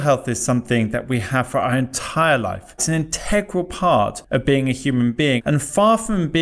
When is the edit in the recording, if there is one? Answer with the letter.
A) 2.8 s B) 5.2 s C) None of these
A